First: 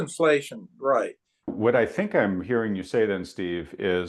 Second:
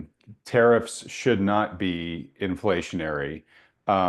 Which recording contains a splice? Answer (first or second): first